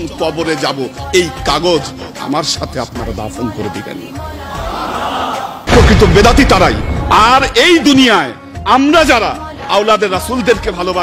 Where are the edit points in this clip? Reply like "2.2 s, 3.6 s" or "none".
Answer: 5.6 s